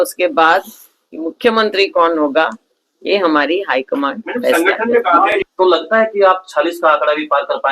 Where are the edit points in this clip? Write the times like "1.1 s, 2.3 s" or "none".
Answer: 5.3 s